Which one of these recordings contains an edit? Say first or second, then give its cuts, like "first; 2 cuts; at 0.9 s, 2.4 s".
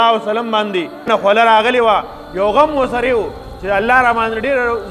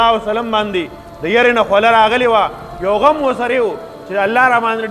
first; 1 cut; at 1.1 s